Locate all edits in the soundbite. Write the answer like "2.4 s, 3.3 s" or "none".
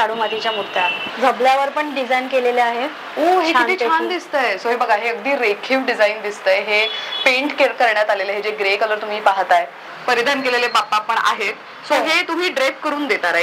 1.0 s, 9.8 s